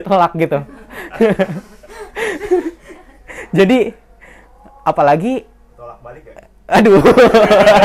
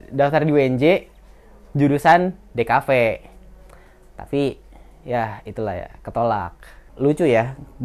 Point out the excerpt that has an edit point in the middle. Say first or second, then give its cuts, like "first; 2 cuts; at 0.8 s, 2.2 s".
second; 1 cut; at 6.9 s